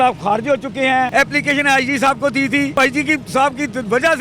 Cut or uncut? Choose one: cut